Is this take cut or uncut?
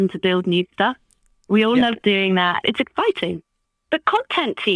cut